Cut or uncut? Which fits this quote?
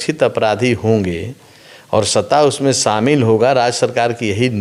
uncut